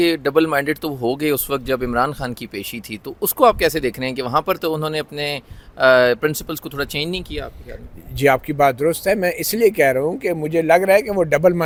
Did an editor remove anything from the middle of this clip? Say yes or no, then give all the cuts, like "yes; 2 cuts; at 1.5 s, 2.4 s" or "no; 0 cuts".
no; 0 cuts